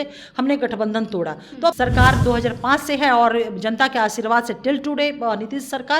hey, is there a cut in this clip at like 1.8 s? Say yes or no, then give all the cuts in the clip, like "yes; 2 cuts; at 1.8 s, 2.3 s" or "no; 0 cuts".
yes; 1 cut; at 1.8 s